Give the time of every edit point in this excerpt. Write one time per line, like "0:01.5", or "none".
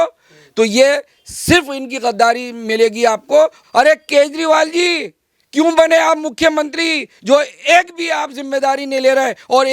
0:03.6